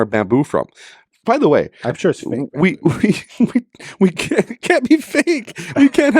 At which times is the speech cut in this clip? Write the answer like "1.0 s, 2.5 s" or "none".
none